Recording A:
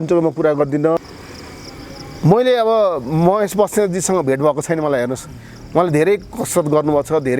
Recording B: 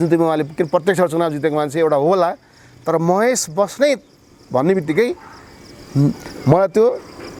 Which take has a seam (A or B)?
A